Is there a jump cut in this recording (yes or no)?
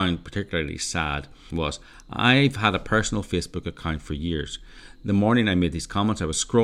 yes